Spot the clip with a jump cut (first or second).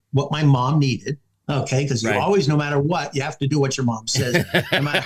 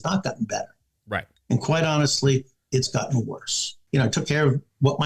second